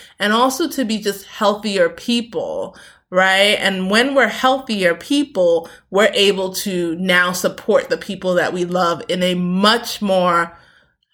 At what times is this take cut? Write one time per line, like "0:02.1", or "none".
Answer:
none